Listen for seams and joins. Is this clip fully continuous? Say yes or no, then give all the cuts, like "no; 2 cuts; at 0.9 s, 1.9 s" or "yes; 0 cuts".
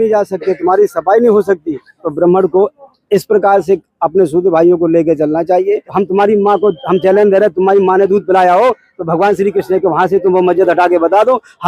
no; 1 cut; at 5.9 s